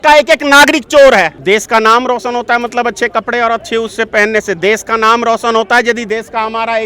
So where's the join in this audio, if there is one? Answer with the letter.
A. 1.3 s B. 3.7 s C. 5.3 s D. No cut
A